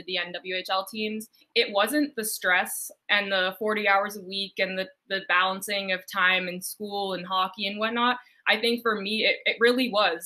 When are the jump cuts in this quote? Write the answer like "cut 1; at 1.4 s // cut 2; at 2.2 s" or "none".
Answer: cut 1; at 1.4 s

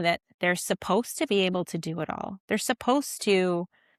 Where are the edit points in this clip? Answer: none

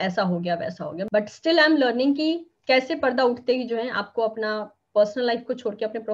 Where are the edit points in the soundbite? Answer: cut 1; at 1.1 s

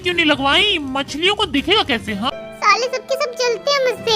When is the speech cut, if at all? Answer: cut 1; at 2.3 s

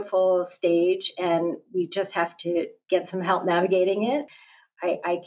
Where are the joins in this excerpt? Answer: cut 1; at 2.8 s // cut 2; at 4.3 s

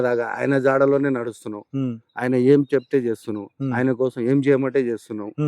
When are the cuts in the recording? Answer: none

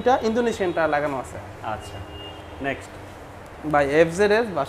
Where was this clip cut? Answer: none

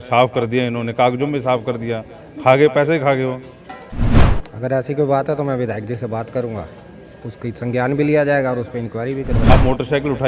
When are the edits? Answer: cut 1; at 9.3 s

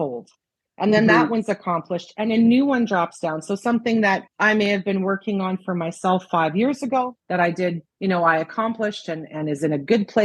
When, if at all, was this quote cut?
cut 1; at 4.3 s // cut 2; at 7.2 s // cut 3; at 7.9 s

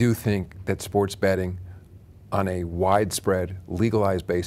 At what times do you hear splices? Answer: none

